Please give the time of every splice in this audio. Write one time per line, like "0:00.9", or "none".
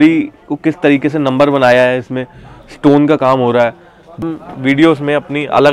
0:04.2